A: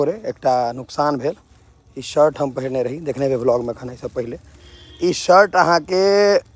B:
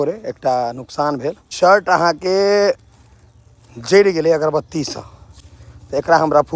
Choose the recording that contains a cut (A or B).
B